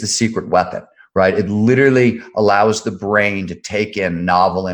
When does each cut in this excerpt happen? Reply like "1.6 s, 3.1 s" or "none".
none